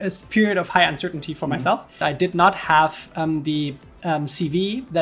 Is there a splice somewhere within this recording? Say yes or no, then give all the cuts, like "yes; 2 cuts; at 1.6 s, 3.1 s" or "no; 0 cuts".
yes; 1 cut; at 2.0 s